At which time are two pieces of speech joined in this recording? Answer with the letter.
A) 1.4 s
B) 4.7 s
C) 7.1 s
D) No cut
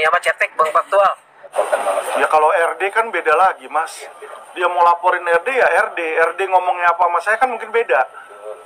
A